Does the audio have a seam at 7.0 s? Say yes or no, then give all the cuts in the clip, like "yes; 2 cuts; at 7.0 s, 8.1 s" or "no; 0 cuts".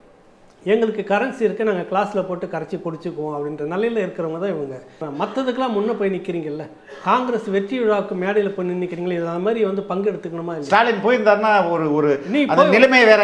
no; 1 cut; at 5.0 s